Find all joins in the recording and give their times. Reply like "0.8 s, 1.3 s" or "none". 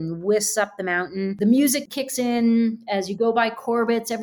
1.3 s, 1.8 s